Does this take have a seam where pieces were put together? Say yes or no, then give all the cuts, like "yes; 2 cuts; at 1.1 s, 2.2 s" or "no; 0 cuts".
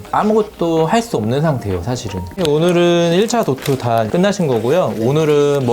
yes; 1 cut; at 2.4 s